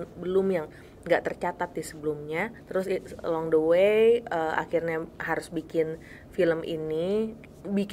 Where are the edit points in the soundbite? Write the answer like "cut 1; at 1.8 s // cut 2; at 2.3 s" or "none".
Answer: cut 1; at 2.6 s